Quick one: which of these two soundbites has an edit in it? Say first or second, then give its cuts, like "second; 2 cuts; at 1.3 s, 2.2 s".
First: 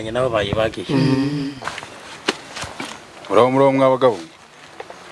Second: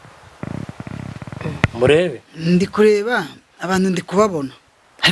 first; 1 cut; at 1.6 s